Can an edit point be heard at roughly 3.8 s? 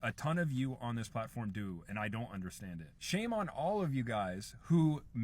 yes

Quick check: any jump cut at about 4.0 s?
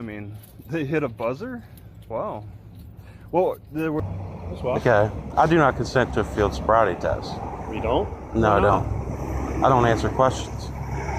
yes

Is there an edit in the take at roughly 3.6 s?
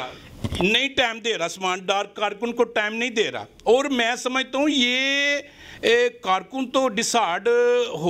no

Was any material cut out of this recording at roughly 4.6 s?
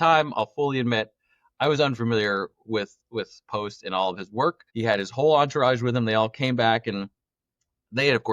yes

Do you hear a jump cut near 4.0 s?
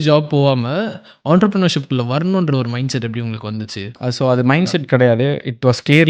yes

